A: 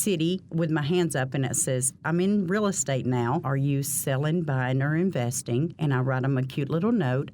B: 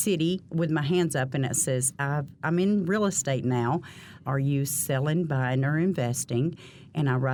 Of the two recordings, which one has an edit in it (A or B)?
A